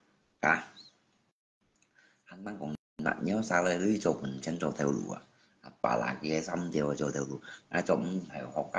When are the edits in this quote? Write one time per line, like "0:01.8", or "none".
none